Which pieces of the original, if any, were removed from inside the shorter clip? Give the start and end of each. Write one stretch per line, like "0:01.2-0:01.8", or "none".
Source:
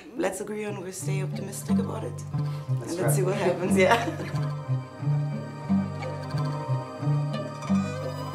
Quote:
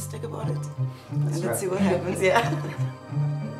0:04.2-0:04.5